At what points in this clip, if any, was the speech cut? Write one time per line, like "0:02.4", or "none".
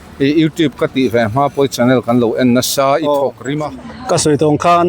0:03.8